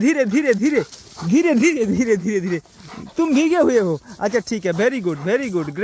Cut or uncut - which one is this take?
uncut